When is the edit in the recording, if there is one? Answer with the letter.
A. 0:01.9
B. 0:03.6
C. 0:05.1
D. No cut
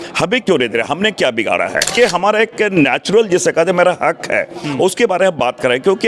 A